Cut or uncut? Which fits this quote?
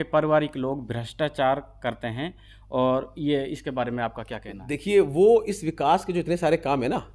uncut